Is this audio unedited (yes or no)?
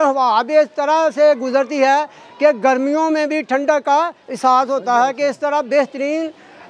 yes